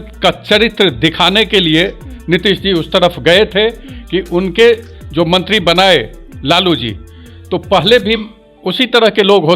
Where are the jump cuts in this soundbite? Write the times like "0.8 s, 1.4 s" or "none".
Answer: none